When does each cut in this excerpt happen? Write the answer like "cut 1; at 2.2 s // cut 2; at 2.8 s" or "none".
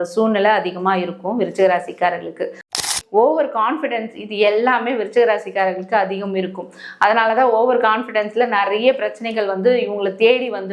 cut 1; at 2.8 s